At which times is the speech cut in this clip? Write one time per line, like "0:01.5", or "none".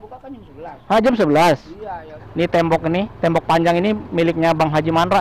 0:02.2

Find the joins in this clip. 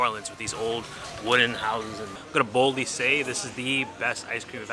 0:02.1

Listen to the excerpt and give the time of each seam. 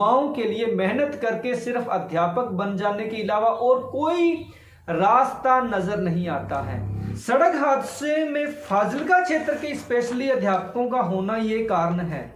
0:07.0

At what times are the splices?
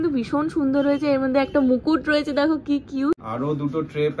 0:03.3

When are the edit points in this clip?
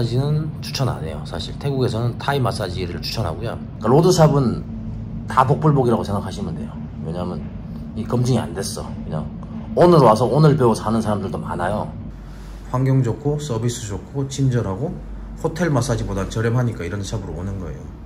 0:03.7
0:12.0

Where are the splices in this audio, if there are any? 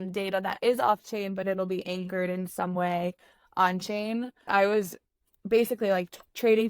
0:04.5

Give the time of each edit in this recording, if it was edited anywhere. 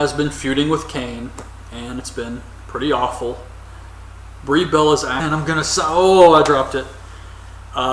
none

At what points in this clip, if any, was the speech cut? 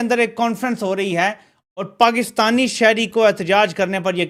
none

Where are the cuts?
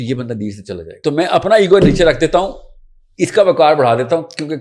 0:00.9

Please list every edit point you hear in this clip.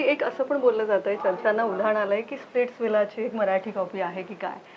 none

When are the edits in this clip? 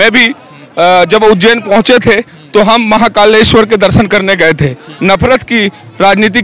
0:04.9

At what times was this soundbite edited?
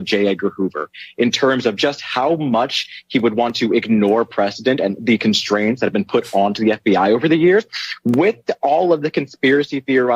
none

